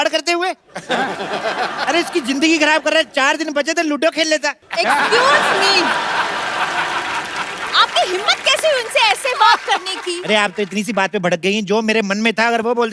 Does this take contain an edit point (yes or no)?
no